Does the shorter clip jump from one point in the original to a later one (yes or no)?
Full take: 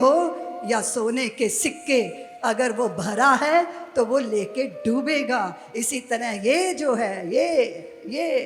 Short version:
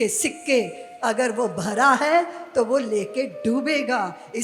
no